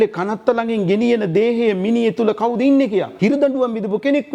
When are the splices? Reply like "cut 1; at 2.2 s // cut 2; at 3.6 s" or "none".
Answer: cut 1; at 3.1 s